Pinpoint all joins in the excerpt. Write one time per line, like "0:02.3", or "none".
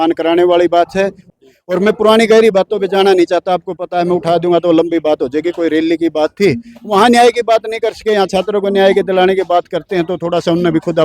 0:01.3